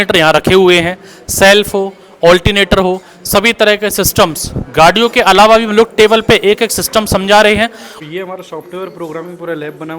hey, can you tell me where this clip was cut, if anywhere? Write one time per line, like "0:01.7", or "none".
0:08.0